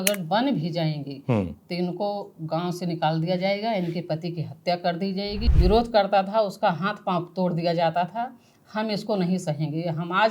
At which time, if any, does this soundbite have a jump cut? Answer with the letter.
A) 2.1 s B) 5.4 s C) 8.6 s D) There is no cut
B